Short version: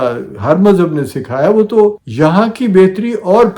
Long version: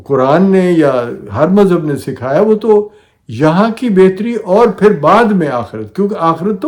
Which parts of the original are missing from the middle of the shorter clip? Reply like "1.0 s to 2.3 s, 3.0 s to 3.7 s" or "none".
3.0 s to 3.3 s